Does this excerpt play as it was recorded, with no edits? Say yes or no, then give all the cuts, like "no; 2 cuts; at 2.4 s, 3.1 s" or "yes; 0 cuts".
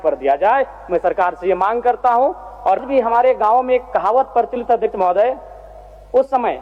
no; 1 cut; at 2.8 s